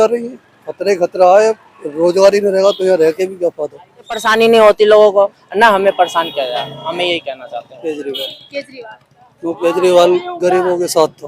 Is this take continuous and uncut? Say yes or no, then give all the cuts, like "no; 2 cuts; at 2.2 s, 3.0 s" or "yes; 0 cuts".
no; 2 cuts; at 4.3 s, 7.7 s